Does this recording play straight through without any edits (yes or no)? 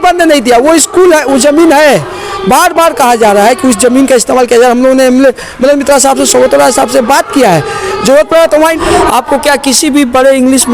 no